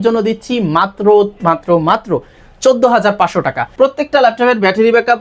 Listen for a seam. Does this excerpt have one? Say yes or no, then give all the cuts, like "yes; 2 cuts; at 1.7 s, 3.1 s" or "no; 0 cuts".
yes; 1 cut; at 3.7 s